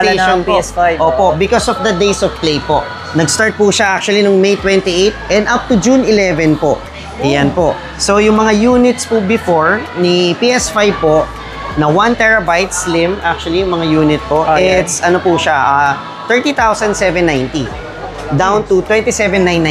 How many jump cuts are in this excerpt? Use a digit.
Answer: 0